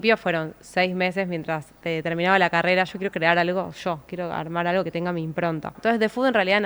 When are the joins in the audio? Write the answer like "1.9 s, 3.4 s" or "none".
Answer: 2.9 s, 5.8 s